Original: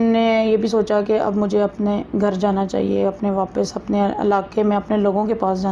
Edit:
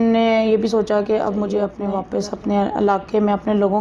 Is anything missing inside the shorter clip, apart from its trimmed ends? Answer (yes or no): yes